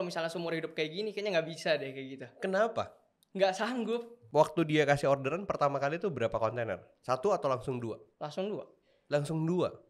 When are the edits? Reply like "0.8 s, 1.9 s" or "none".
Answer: 4.1 s